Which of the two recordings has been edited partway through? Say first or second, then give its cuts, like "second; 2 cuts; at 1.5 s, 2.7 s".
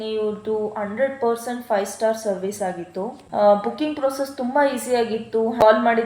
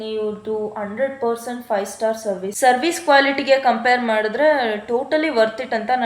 second; 1 cut; at 2.5 s